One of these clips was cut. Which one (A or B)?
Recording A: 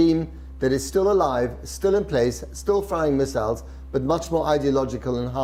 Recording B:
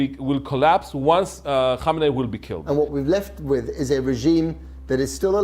B